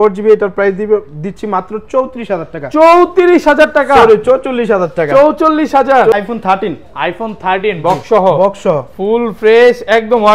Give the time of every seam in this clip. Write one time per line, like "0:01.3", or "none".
0:06.1